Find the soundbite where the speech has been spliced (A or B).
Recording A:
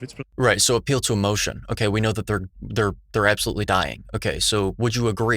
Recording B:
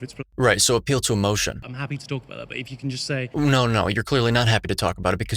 B